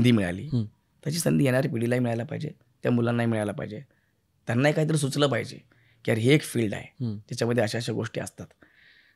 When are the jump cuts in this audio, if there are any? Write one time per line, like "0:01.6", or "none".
none